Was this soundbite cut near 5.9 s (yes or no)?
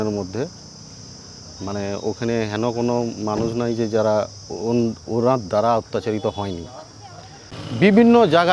no